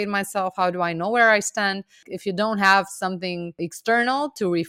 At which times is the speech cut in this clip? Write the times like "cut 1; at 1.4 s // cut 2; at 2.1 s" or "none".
cut 1; at 2.0 s // cut 2; at 3.5 s